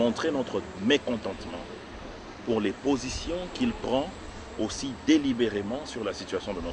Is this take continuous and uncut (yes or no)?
yes